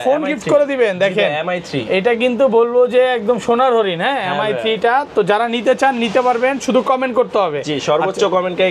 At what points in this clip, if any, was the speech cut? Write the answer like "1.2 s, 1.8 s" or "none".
none